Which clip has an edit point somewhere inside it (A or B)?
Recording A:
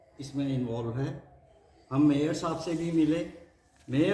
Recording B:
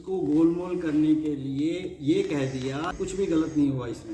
B